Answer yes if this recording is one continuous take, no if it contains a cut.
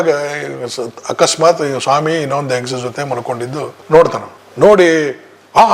yes